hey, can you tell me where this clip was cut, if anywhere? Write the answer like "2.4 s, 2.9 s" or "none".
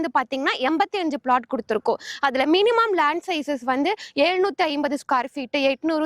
none